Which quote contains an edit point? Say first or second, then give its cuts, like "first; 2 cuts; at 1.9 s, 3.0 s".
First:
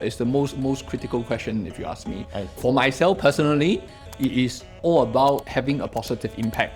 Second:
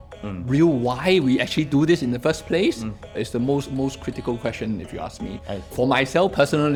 first; 2 cuts; at 4.7 s, 5.5 s